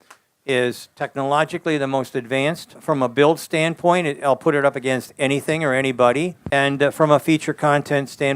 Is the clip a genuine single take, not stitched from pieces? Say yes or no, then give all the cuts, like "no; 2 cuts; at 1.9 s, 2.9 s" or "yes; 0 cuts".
no; 2 cuts; at 2.7 s, 6.4 s